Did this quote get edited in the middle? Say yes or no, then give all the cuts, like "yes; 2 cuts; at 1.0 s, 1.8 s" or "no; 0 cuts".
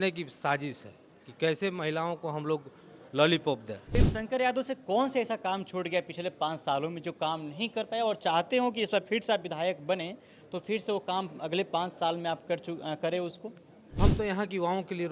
yes; 2 cuts; at 3.9 s, 14.0 s